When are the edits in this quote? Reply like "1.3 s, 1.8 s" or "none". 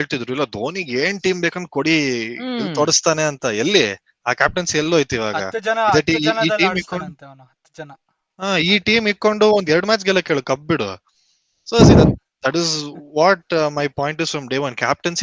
none